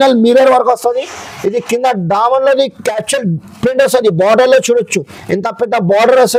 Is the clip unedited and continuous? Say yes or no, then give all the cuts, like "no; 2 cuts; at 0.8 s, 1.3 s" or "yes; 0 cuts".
yes; 0 cuts